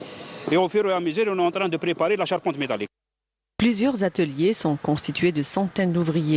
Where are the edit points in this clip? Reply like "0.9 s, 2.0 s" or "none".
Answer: 2.2 s

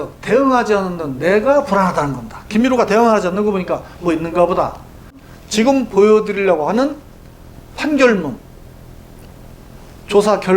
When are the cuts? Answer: 5.3 s

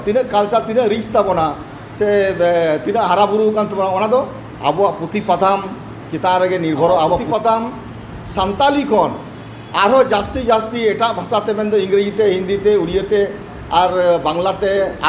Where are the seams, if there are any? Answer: 7.2 s

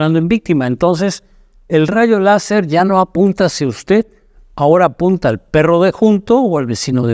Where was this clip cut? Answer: none

